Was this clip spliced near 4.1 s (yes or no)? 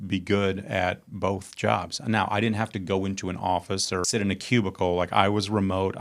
yes